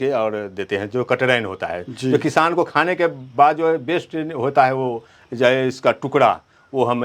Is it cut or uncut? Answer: uncut